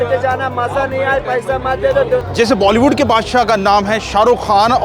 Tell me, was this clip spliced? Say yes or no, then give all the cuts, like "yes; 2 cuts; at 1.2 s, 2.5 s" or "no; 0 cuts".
yes; 1 cut; at 2.3 s